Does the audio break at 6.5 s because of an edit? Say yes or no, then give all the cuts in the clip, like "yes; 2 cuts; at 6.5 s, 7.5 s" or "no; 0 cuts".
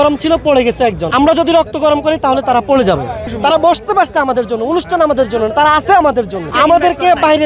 yes; 3 cuts; at 1.0 s, 3.2 s, 6.5 s